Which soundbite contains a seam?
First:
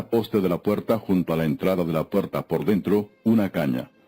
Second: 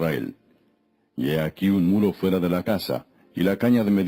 first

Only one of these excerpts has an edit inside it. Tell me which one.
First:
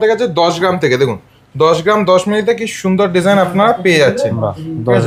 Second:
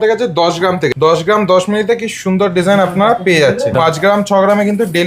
second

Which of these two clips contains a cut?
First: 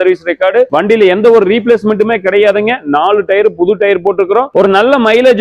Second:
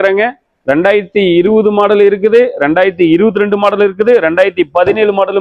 first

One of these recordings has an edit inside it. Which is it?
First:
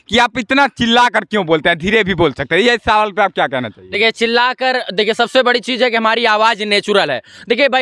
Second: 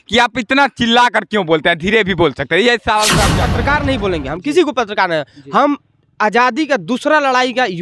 second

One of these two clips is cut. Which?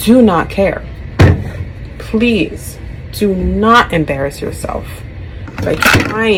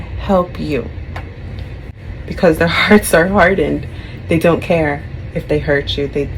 second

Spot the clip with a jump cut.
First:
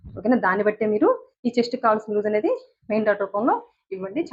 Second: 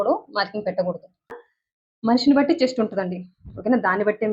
second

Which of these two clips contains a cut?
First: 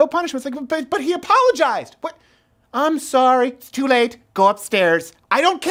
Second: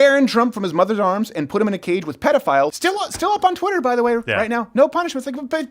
second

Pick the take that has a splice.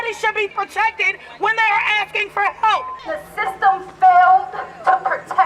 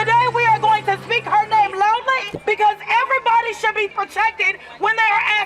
first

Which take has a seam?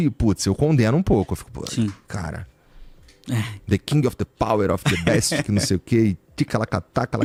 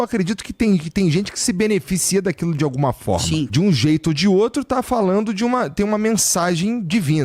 second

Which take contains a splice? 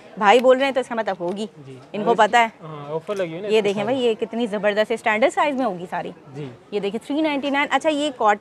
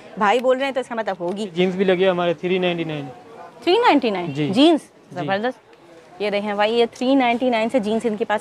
second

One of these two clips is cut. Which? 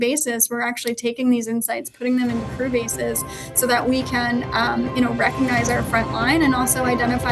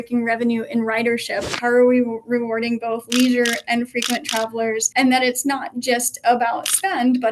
second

